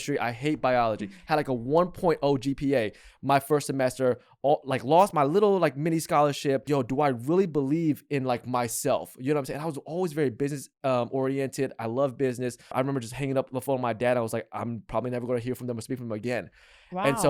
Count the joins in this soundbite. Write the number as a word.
two